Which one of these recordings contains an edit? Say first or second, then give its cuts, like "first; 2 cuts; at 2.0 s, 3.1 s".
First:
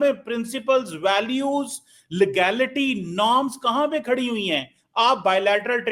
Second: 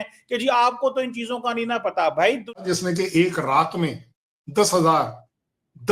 second; 1 cut; at 2.6 s